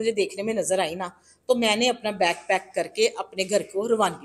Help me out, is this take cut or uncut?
uncut